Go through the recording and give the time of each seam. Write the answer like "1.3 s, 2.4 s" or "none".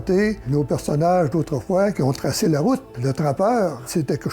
2.9 s